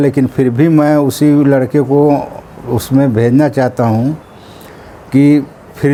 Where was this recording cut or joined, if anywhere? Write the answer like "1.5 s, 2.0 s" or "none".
none